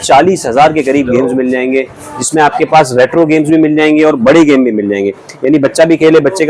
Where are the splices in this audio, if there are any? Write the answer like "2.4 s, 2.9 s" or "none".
none